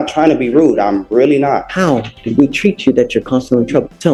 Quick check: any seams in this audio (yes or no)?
no